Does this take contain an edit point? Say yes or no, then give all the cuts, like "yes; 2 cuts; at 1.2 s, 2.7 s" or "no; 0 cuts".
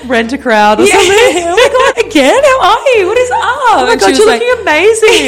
yes; 1 cut; at 1.9 s